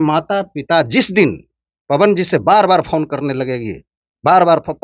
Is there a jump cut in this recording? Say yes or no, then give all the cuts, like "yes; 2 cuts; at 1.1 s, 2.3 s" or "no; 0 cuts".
no; 0 cuts